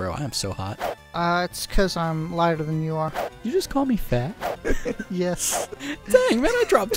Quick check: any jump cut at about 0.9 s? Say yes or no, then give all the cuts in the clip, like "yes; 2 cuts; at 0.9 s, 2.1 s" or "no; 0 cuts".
yes; 2 cuts; at 0.9 s, 3.3 s